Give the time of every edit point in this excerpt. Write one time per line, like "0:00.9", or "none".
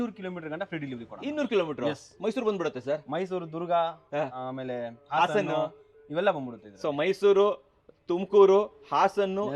none

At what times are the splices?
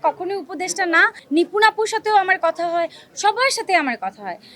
0:01.2

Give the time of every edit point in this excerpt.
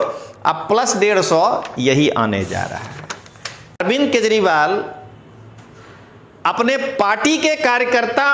0:03.8

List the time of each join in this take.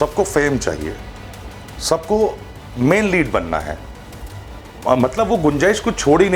none

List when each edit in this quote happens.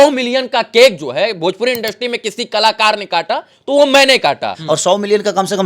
0:04.5

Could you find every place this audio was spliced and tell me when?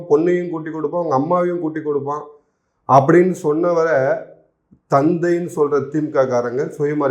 none

